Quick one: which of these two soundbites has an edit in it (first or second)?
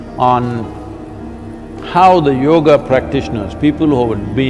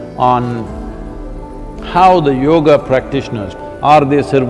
second